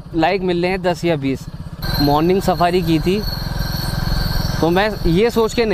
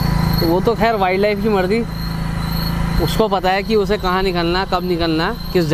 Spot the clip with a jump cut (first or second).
first